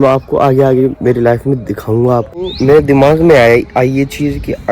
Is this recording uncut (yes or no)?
no